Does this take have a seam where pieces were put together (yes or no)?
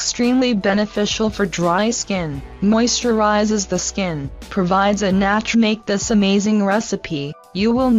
no